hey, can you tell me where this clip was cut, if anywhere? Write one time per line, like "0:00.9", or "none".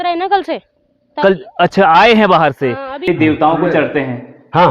0:03.1

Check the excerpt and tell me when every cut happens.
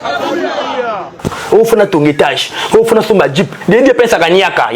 0:01.1

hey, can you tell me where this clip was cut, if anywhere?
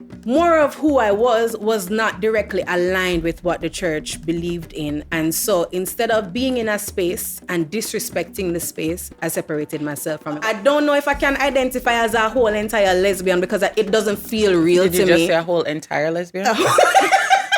0:10.4

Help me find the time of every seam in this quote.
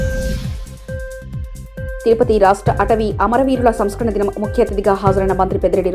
0:01.9

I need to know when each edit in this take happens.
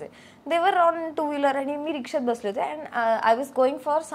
none

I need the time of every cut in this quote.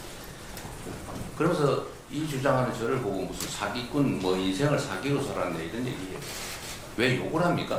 none

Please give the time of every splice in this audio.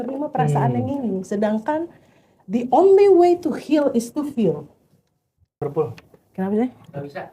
0:05.6

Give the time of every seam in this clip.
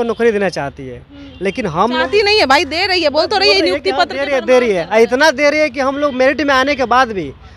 none

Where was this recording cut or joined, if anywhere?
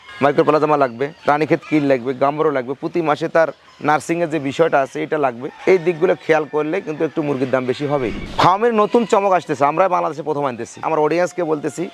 0:08.2
0:10.7

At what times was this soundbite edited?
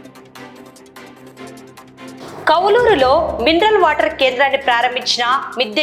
0:01.5

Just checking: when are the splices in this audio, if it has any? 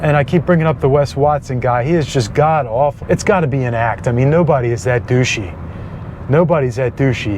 0:03.0

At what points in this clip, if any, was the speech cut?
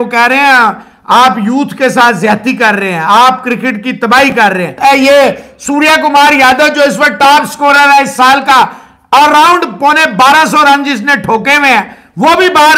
0:04.7

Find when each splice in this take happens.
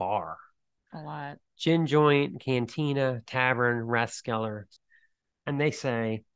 0:04.7

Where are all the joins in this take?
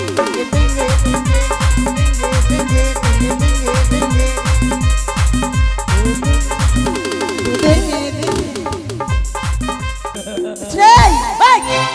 0:10.3

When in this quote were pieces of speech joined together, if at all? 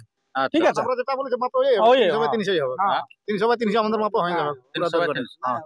none

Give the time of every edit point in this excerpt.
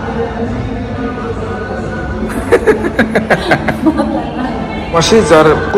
none

